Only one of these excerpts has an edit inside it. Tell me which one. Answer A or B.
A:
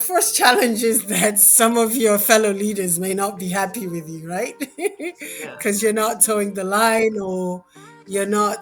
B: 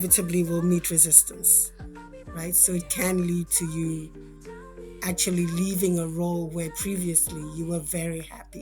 B